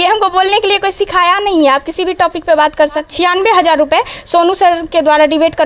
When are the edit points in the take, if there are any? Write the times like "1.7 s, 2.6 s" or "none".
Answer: 3.1 s